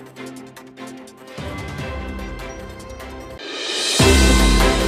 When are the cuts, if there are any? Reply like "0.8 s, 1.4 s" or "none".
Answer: 3.4 s